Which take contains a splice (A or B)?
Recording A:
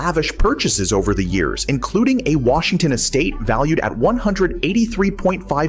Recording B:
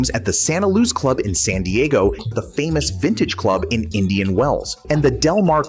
B